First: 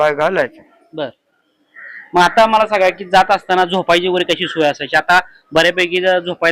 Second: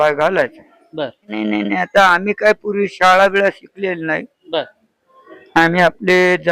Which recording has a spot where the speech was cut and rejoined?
second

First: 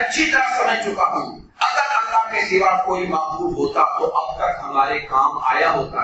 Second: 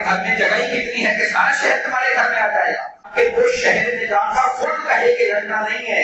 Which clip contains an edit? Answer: second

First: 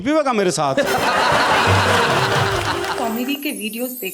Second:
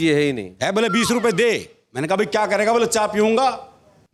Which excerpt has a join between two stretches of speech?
first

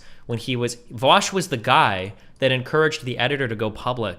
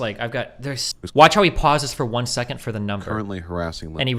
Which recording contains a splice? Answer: second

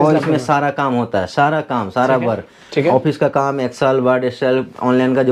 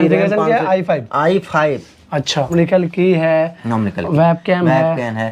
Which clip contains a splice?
second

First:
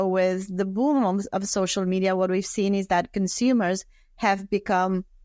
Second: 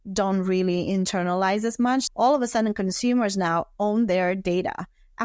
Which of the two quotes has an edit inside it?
second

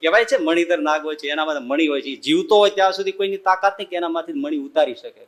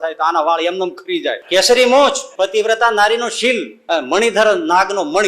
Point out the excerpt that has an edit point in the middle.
second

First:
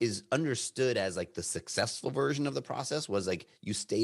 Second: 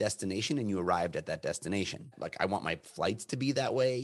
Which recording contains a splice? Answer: second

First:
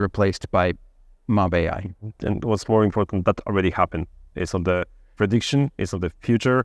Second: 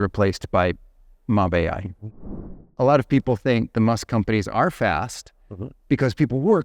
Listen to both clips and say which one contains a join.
second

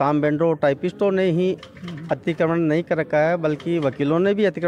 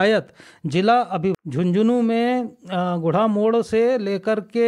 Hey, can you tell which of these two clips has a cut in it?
second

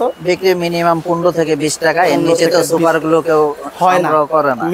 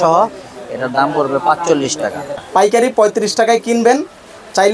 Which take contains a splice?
second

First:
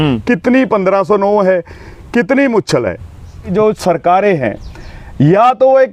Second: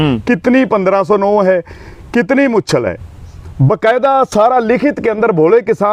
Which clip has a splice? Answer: first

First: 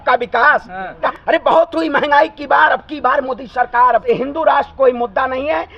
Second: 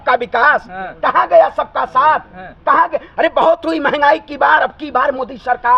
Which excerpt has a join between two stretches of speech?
first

